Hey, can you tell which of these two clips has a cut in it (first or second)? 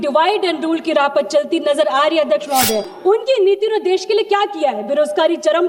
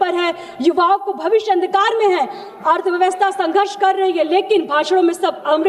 first